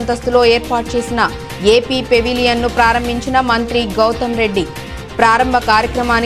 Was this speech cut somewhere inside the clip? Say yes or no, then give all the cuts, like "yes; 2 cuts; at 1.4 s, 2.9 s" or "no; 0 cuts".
no; 0 cuts